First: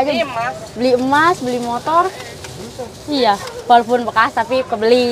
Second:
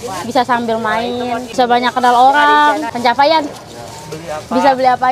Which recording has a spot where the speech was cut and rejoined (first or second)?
second